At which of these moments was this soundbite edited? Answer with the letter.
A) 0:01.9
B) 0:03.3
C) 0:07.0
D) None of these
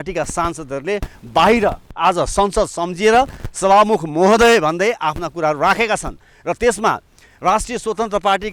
D